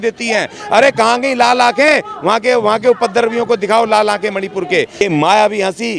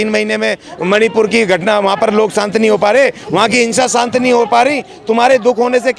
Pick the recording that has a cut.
first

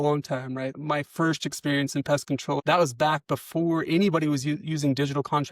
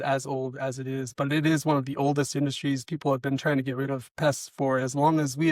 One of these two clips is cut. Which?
first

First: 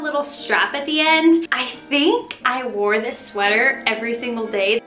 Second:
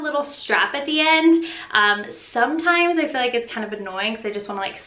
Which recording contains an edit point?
first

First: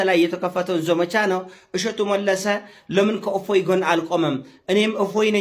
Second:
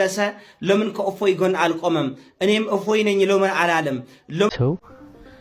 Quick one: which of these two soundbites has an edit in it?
second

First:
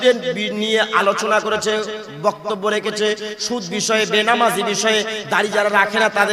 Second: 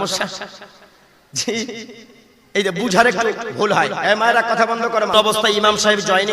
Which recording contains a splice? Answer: second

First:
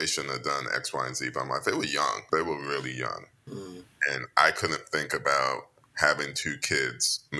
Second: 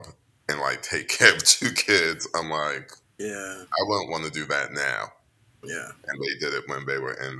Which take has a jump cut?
first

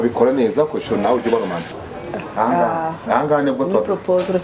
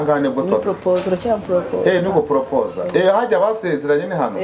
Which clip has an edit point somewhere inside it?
first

